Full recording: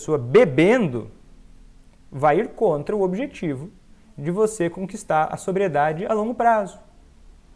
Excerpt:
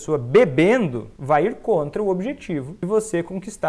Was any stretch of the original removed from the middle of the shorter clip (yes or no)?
yes